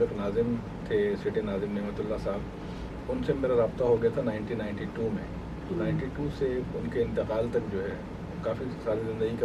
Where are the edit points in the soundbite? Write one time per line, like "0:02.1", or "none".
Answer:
none